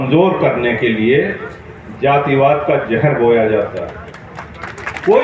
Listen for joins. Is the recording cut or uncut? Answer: uncut